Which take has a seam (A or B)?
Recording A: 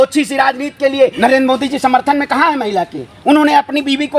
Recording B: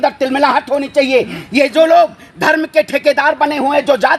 A